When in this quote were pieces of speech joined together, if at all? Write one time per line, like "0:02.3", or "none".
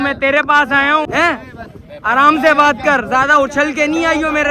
0:01.1